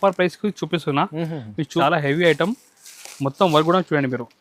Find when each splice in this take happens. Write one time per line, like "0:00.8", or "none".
0:01.8